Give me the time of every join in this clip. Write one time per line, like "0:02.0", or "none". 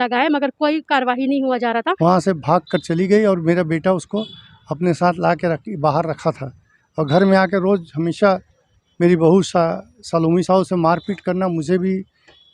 0:01.9